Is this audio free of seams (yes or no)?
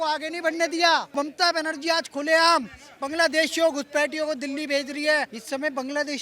no